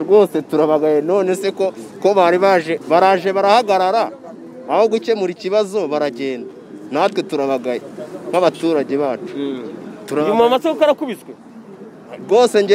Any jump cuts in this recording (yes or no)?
no